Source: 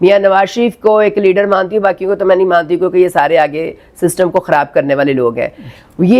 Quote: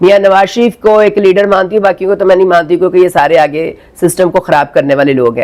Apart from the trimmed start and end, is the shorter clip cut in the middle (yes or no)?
no